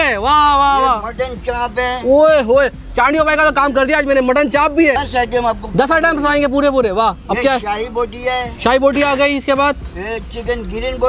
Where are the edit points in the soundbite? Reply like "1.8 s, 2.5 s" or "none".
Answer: 5.0 s